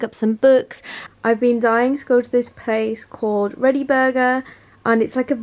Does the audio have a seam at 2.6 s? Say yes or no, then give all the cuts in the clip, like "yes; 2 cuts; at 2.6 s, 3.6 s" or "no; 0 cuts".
no; 1 cut; at 0.9 s